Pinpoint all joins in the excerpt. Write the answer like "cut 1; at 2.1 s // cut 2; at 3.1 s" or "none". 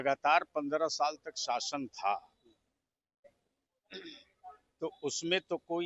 none